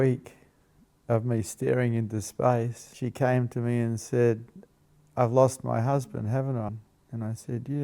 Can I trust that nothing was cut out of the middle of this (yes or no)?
no